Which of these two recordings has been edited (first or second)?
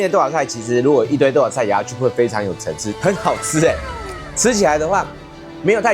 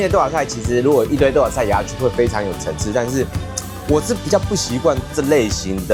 first